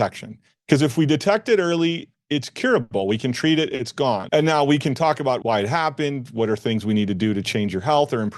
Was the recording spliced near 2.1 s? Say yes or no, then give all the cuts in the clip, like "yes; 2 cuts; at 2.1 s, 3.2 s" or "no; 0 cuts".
no; 2 cuts; at 4.2 s, 5.4 s